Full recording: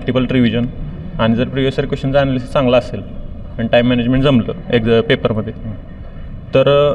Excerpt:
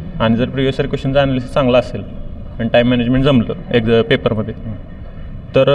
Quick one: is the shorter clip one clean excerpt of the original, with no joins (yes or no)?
yes